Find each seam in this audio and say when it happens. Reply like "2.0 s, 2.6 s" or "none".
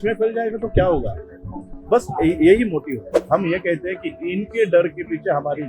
3.2 s